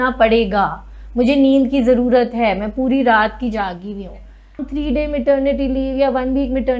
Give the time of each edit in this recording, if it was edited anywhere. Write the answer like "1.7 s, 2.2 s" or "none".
4.7 s

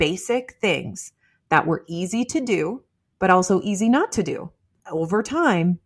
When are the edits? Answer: 4.8 s

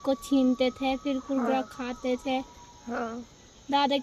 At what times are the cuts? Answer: none

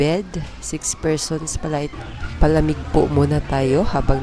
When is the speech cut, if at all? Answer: 1.9 s

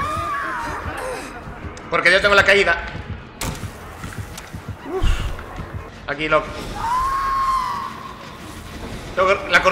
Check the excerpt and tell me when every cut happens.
5.9 s

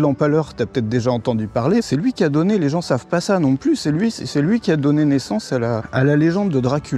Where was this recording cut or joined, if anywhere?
1.8 s, 5.8 s

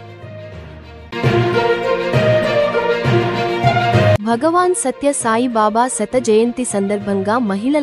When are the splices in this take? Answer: none

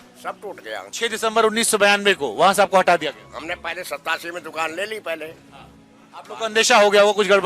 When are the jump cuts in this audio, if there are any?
0.9 s

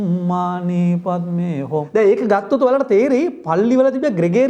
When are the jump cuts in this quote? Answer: 1.9 s

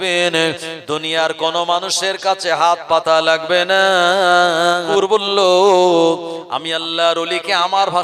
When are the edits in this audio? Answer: 4.9 s

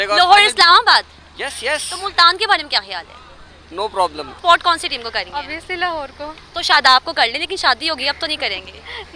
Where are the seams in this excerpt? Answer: 4.3 s

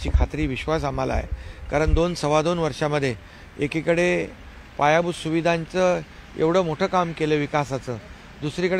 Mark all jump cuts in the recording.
none

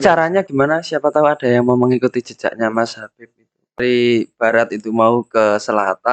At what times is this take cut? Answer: 3.8 s

